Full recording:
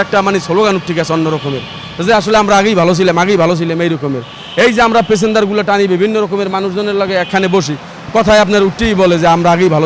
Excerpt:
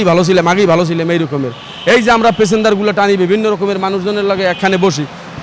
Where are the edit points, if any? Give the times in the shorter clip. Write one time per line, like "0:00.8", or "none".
none